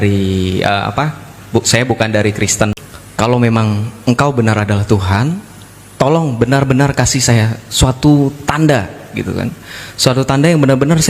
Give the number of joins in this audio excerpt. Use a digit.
1